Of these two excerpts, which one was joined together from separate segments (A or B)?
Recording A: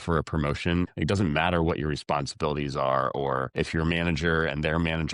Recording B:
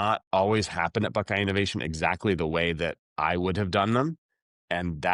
A